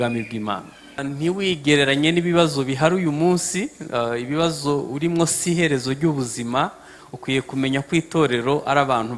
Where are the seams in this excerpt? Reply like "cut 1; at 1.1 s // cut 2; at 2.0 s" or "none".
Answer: cut 1; at 1.0 s